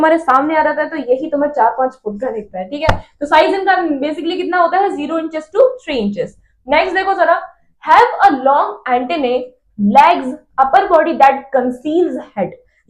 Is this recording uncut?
yes; 0 cuts

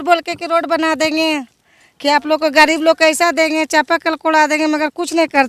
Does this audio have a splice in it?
no; 0 cuts

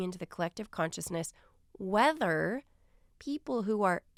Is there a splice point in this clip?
no; 0 cuts

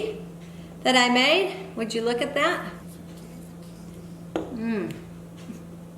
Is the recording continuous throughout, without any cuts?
no; 1 cut; at 2.8 s

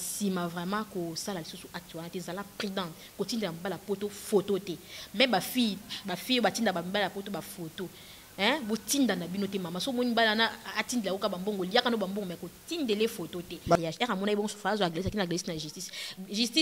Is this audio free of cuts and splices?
no; 1 cut; at 13.8 s

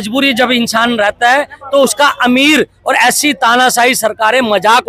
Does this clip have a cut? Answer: no; 0 cuts

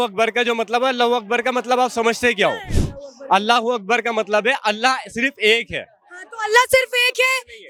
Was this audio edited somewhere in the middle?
no; 0 cuts

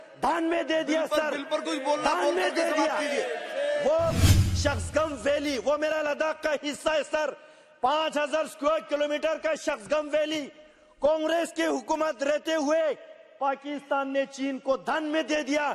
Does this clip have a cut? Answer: yes; 1 cut; at 4.3 s

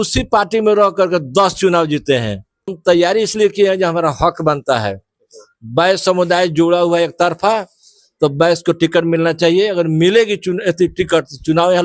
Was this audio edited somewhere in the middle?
yes; 1 cut; at 2.7 s

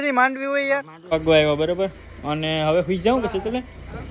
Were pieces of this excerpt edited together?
yes; 1 cut; at 1.1 s

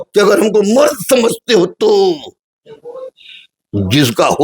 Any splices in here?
yes; 1 cut; at 2.5 s

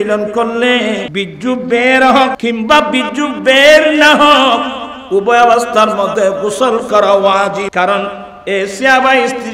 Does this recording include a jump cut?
yes; 3 cuts; at 1.1 s, 2.4 s, 7.7 s

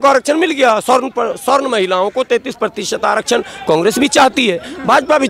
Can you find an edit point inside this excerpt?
no; 0 cuts

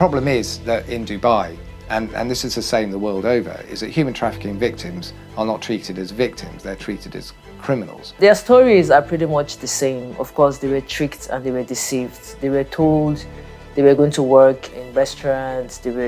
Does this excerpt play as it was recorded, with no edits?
no; 2 cuts; at 8.0 s, 14.7 s

